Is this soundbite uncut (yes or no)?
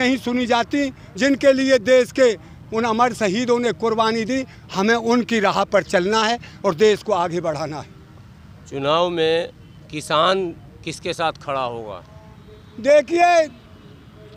yes